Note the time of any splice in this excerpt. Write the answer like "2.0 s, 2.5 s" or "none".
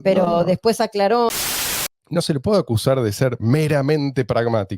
1.7 s